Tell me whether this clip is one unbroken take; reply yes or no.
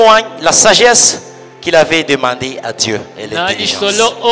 yes